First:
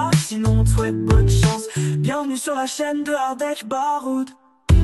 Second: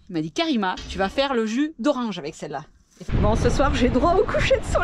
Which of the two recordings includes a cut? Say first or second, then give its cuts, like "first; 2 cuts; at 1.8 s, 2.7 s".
second; 1 cut; at 3.1 s